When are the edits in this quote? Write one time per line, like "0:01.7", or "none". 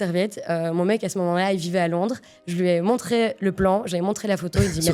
none